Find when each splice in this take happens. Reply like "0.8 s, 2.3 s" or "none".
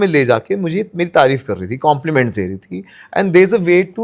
none